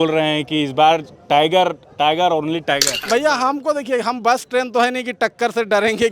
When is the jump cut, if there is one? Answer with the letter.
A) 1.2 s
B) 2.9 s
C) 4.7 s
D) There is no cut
B